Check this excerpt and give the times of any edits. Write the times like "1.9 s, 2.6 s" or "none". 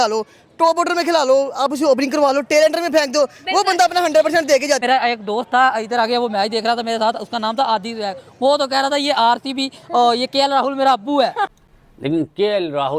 11.5 s